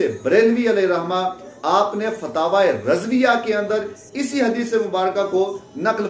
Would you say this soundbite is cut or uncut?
uncut